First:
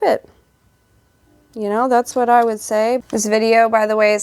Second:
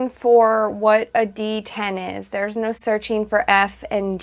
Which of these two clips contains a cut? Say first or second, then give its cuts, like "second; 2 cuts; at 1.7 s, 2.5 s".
first; 1 cut; at 3.0 s